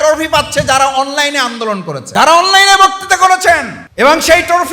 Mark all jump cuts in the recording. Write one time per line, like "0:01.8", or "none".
0:02.0
0:03.8